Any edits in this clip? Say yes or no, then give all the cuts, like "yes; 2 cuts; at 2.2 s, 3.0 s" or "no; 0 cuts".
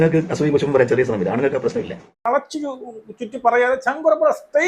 yes; 1 cut; at 2.3 s